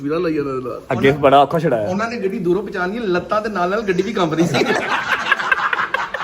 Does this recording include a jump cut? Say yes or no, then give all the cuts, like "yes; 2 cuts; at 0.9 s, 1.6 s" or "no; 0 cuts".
yes; 1 cut; at 4.9 s